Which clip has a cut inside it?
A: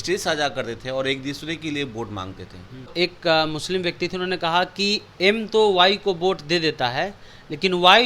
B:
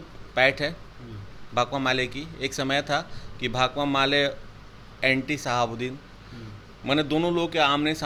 A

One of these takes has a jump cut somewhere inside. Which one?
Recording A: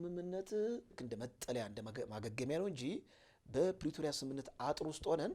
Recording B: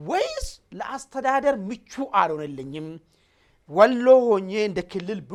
A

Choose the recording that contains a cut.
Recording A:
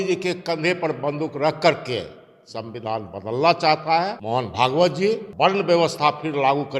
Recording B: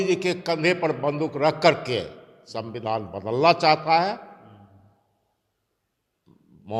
A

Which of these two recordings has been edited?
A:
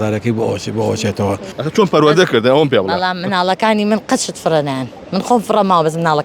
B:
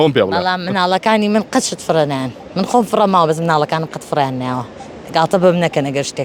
A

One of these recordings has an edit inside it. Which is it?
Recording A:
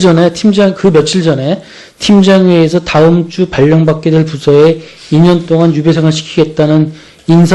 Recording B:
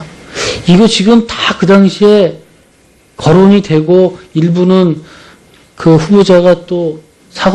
B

